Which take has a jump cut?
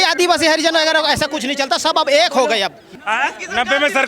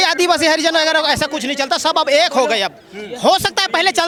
first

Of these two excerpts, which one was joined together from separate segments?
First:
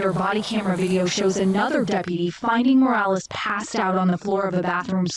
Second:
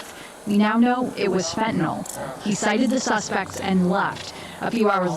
second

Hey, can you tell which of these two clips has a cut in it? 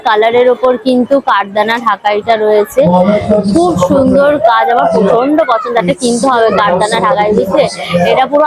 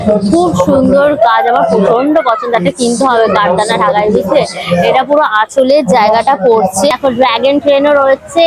second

